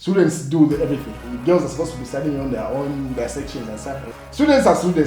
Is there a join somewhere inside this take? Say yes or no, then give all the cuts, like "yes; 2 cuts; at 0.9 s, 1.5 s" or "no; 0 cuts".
yes; 2 cuts; at 1.2 s, 4.1 s